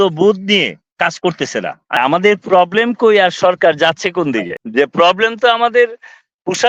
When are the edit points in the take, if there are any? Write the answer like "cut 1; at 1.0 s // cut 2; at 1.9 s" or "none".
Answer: cut 1; at 2.0 s // cut 2; at 4.6 s